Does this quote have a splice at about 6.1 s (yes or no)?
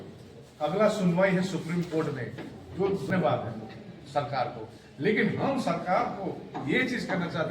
no